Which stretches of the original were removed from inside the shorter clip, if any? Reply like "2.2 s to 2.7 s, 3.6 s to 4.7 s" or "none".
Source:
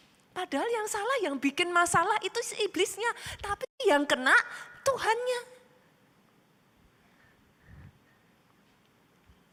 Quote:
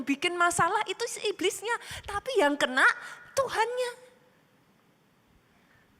3.6 s to 3.8 s